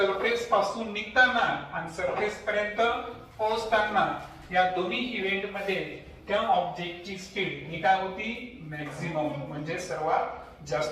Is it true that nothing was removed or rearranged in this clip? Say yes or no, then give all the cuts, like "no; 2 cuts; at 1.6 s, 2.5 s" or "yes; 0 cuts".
yes; 0 cuts